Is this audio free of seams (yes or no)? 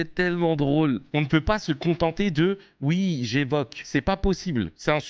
no